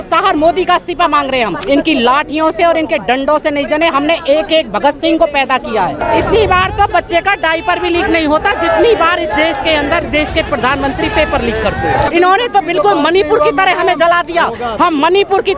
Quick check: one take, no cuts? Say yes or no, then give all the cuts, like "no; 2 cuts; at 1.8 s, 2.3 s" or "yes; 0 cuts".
no; 3 cuts; at 1.6 s, 6.0 s, 12.1 s